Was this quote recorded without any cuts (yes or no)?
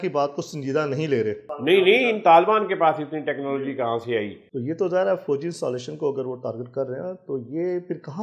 no